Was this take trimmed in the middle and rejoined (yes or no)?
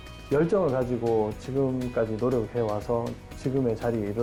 no